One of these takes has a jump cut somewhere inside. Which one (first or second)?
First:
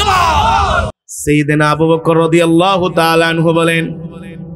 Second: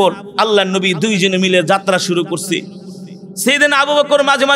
first